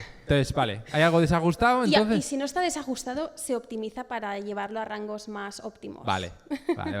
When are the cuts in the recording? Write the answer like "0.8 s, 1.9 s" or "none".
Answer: none